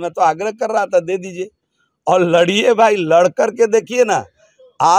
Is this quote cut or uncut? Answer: uncut